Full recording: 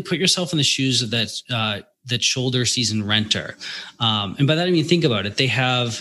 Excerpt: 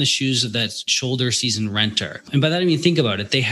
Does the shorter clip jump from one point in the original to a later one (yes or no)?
yes